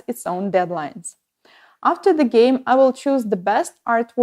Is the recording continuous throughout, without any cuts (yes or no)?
yes